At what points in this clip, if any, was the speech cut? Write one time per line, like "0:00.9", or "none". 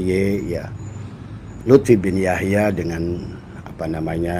none